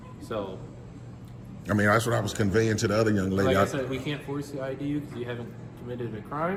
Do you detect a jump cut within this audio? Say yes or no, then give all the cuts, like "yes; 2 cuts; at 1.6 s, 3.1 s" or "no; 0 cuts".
no; 0 cuts